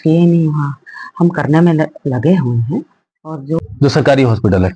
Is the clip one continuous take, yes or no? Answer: no